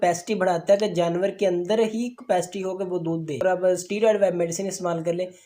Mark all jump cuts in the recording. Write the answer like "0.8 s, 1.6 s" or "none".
3.4 s